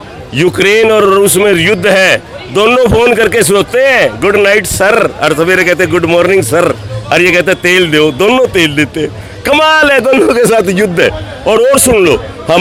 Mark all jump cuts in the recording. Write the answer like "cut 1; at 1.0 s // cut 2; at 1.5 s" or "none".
none